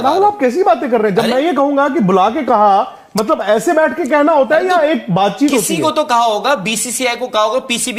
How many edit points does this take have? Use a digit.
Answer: 0